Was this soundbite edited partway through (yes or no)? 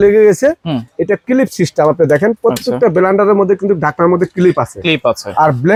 no